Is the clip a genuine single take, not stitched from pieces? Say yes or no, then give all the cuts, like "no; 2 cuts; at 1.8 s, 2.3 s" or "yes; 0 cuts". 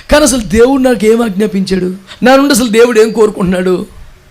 no; 1 cut; at 2.0 s